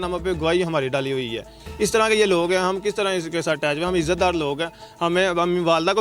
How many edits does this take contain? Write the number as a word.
zero